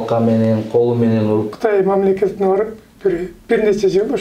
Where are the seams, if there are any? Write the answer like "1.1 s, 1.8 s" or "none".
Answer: 1.5 s